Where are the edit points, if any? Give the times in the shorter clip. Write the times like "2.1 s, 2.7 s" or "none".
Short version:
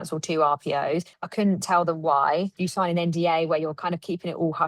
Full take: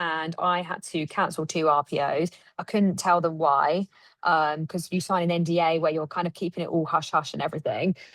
1.2 s, 2.6 s